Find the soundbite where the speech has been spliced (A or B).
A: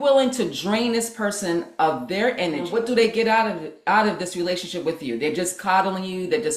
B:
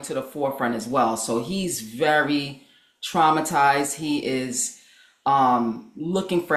A